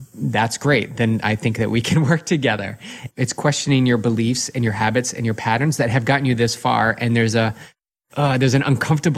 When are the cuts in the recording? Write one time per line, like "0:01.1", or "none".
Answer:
0:03.1
0:08.0